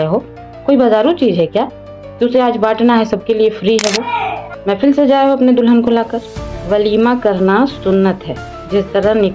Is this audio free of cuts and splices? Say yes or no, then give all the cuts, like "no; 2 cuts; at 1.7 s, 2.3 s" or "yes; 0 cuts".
no; 1 cut; at 4.5 s